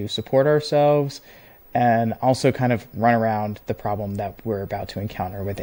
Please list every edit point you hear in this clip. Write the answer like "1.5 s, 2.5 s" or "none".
none